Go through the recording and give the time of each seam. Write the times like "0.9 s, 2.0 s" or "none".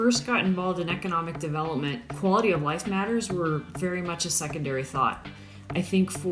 2.1 s